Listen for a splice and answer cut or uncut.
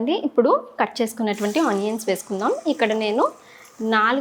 uncut